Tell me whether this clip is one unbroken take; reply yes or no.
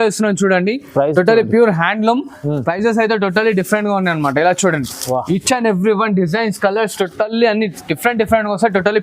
yes